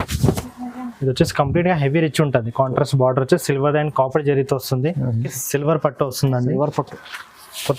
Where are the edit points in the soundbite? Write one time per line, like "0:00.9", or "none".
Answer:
0:05.4